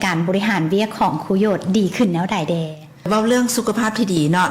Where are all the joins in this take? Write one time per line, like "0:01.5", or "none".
0:03.1